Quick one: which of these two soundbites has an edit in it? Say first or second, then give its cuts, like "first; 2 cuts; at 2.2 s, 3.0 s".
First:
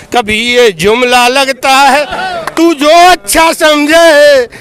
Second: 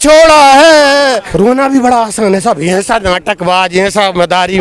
second; 1 cut; at 1.2 s